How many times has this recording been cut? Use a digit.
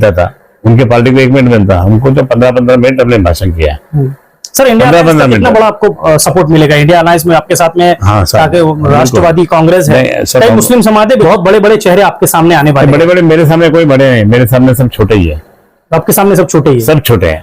1